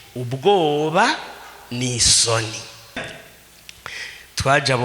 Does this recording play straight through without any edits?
no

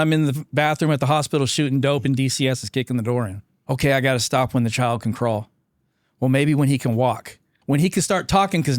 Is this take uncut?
no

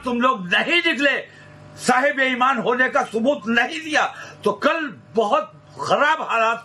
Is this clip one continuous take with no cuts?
yes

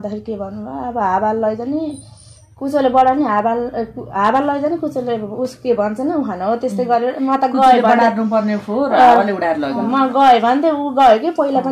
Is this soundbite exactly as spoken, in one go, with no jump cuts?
yes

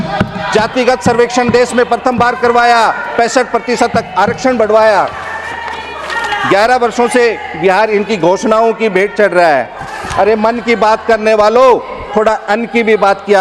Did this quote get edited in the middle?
no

